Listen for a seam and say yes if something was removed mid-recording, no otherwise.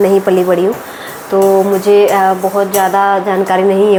no